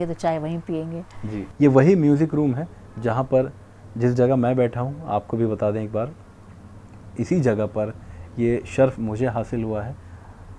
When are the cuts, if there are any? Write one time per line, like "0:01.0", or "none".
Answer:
0:01.4